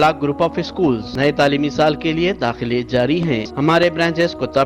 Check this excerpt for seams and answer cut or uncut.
cut